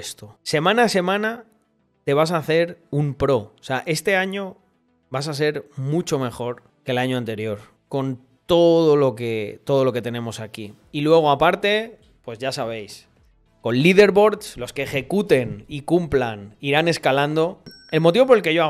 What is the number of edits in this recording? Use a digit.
1